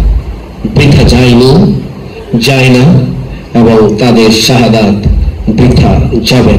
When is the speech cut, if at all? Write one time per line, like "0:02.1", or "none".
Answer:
none